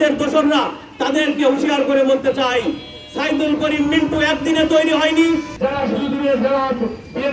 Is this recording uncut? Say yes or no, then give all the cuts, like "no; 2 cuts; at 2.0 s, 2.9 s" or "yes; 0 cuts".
no; 1 cut; at 5.5 s